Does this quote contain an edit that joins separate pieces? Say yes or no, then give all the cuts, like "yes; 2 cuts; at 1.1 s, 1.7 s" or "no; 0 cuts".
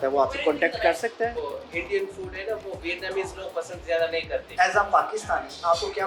yes; 2 cuts; at 1.4 s, 4.5 s